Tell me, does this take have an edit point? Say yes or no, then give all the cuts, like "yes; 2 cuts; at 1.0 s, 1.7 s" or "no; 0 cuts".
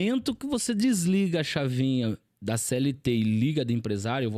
no; 0 cuts